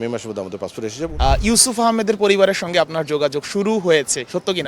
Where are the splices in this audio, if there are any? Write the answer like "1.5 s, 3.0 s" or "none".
1.0 s